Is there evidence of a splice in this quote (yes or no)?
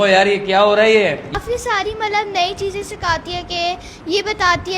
yes